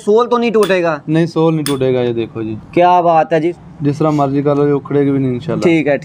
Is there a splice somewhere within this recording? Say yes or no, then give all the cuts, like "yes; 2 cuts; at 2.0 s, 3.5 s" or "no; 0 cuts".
yes; 1 cut; at 3.5 s